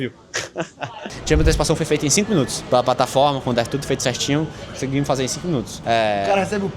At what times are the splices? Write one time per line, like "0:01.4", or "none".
0:01.1
0:02.6
0:05.7